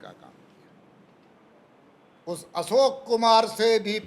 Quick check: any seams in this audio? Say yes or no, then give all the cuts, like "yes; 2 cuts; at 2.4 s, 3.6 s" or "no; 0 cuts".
yes; 1 cut; at 1.4 s